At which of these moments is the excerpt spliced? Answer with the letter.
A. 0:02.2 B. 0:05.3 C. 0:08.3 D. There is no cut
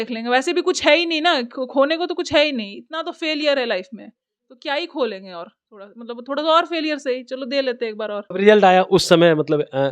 C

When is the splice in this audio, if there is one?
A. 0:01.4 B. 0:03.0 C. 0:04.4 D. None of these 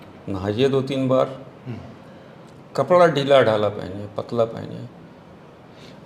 D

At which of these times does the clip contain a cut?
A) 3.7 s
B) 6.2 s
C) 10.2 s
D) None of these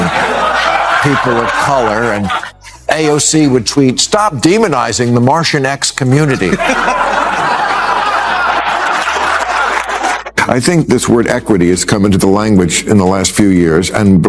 C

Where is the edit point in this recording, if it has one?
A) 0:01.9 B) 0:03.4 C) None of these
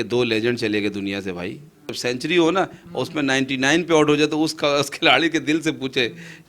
A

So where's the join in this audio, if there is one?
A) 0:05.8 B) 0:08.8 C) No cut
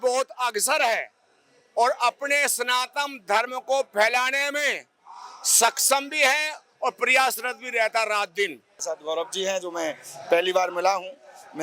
B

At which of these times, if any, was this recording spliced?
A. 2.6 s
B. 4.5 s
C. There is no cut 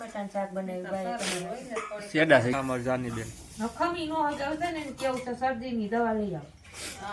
A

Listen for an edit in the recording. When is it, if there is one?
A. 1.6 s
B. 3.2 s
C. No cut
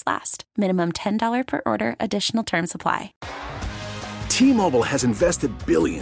B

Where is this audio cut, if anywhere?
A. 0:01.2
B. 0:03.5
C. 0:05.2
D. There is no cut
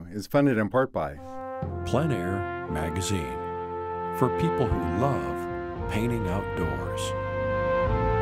A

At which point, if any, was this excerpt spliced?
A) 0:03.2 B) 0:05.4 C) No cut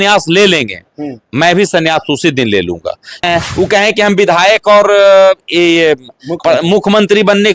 A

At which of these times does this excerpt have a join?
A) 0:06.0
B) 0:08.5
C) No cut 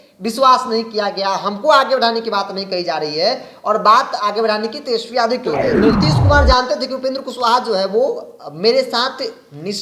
A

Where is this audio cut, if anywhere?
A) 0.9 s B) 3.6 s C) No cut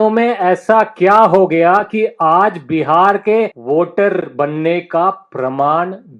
B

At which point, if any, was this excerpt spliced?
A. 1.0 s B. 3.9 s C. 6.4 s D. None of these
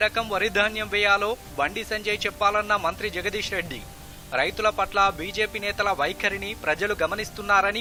D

